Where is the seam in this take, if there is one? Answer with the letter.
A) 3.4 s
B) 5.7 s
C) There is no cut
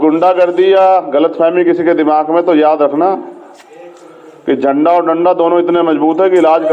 C